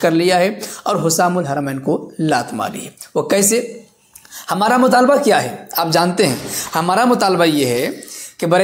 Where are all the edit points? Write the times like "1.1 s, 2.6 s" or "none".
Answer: none